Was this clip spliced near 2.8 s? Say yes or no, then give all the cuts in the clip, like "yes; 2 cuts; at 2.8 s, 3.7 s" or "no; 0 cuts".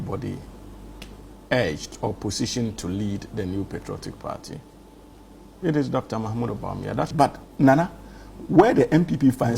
no; 1 cut; at 7.1 s